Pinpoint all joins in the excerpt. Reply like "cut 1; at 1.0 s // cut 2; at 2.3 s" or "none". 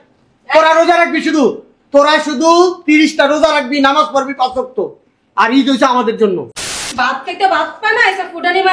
cut 1; at 6.6 s